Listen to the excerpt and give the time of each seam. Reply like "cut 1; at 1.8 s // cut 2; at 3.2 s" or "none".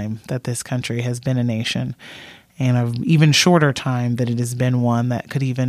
none